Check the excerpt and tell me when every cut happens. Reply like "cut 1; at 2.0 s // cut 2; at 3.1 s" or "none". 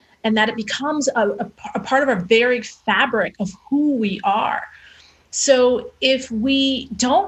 cut 1; at 1.5 s